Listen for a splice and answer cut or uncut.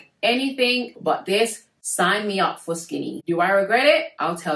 uncut